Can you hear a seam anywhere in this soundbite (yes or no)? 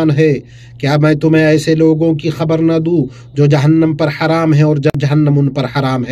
yes